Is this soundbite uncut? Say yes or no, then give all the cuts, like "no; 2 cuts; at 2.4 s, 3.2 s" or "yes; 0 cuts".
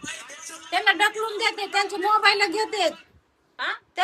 yes; 0 cuts